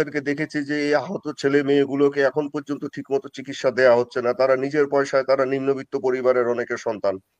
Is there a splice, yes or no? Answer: no